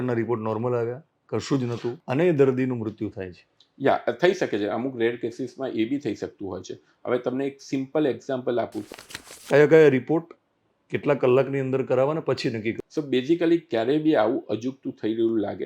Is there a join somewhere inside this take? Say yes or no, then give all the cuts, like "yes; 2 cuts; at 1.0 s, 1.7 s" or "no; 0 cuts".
yes; 3 cuts; at 2.0 s, 8.9 s, 12.8 s